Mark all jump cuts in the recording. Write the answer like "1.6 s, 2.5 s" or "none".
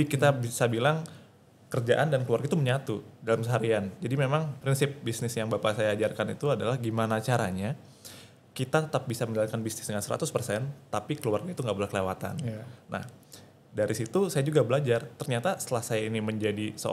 4.6 s

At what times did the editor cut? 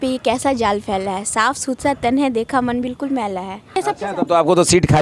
3.7 s

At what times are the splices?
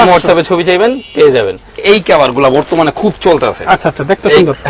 1.8 s

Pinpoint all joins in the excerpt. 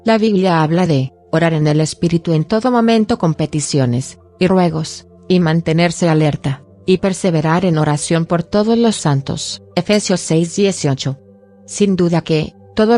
11.0 s

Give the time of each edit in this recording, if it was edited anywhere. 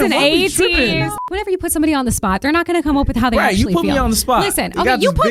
1.2 s

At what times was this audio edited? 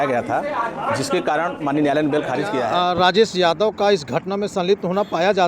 2.7 s

